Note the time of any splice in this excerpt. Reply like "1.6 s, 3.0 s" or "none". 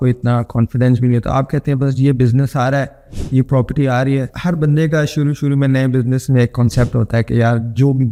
none